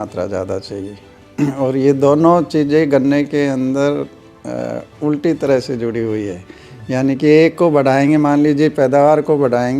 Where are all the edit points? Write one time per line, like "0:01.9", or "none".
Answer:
none